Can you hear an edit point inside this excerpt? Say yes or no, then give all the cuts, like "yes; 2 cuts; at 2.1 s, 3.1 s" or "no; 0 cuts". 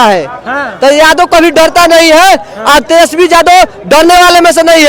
no; 0 cuts